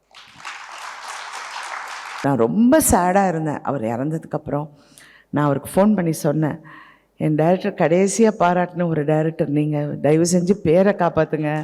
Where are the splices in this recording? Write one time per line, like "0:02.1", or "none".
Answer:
0:02.2